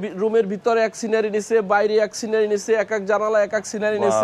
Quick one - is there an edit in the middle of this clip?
no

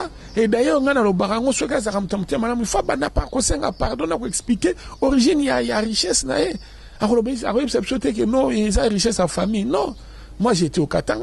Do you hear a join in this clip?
no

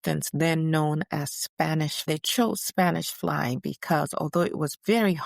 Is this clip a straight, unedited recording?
no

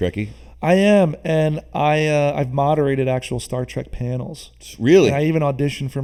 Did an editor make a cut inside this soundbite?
no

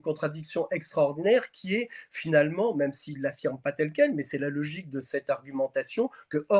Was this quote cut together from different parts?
no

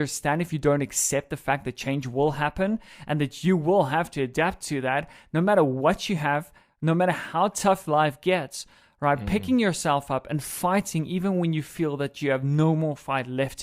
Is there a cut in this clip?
no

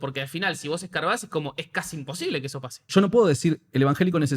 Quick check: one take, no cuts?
no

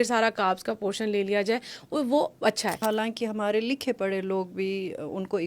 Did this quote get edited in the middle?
yes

